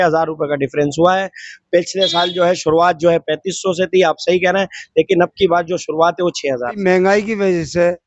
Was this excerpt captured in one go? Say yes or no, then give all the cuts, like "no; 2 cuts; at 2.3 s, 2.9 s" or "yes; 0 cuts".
no; 1 cut; at 6.8 s